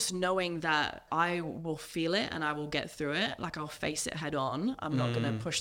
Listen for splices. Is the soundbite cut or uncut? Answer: cut